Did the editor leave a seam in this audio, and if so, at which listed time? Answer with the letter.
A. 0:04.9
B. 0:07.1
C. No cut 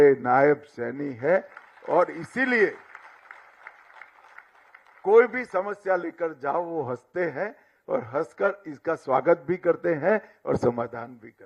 C